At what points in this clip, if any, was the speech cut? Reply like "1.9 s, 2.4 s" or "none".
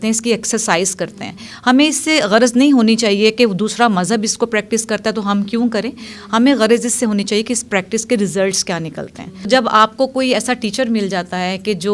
9.5 s